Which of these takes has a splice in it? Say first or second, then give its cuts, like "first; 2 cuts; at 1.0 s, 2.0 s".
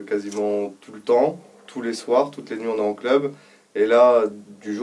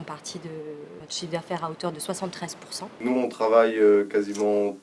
second; 2 cuts; at 1.1 s, 3.0 s